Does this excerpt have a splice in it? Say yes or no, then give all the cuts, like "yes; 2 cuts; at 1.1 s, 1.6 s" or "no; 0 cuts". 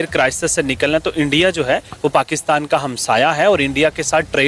no; 0 cuts